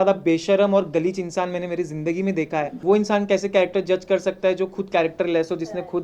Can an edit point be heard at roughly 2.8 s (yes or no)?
yes